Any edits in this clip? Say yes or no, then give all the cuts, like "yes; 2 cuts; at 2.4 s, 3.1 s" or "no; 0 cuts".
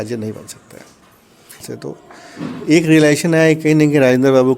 yes; 1 cut; at 1.7 s